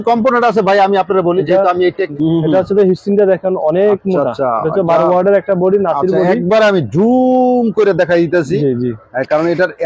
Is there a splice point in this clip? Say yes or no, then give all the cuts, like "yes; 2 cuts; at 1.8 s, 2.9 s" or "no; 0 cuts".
yes; 1 cut; at 2.1 s